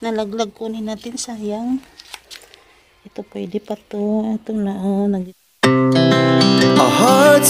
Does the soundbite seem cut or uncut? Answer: cut